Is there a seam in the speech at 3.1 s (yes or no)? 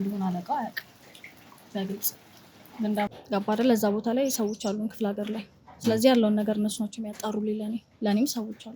yes